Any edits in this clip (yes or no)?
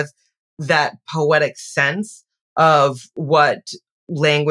no